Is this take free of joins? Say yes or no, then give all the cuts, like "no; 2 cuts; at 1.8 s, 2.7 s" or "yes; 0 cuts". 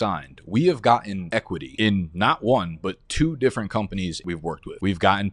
yes; 0 cuts